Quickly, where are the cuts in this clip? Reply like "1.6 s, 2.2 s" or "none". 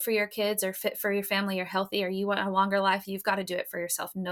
none